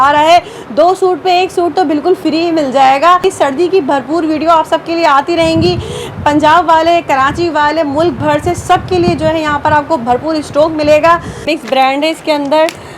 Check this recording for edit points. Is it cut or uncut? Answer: cut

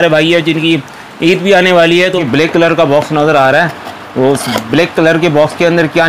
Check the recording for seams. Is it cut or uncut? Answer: cut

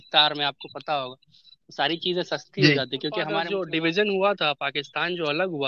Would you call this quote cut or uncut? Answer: cut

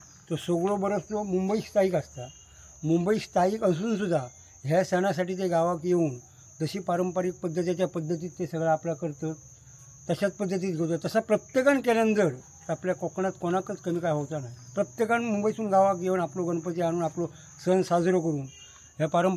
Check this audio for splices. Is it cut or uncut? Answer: uncut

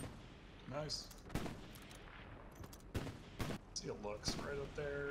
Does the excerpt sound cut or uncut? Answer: cut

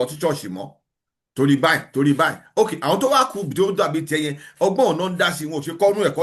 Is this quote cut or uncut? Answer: uncut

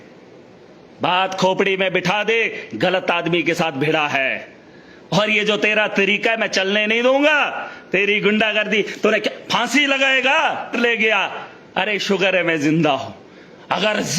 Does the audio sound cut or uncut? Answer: cut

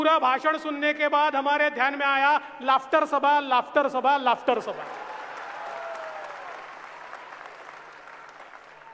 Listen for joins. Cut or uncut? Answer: uncut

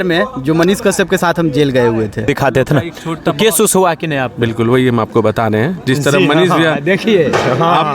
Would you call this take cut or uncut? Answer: cut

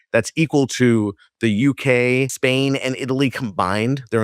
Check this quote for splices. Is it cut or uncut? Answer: uncut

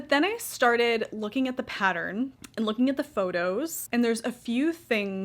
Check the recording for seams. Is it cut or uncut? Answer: cut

